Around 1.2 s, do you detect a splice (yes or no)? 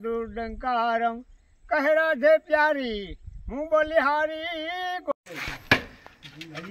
no